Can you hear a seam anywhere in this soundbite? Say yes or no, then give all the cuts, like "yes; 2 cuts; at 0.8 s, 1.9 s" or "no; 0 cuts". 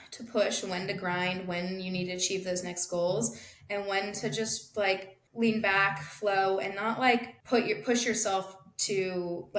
yes; 2 cuts; at 5.2 s, 7.3 s